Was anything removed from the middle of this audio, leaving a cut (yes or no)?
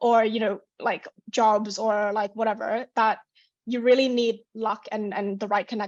no